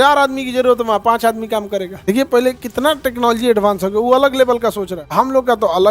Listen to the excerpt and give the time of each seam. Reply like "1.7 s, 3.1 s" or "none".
2.0 s, 5.0 s